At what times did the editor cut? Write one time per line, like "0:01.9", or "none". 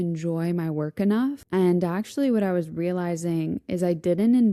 0:01.4